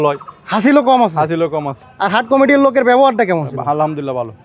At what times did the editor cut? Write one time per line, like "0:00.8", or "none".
none